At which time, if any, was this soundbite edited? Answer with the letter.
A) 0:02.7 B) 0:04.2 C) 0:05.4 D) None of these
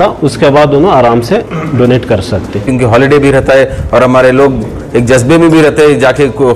A